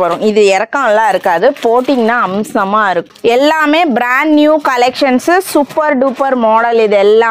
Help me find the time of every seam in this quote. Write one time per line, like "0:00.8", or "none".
0:03.0